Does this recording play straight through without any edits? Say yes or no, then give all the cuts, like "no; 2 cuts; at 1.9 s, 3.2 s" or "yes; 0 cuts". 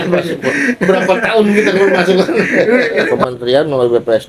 no; 1 cut; at 3.1 s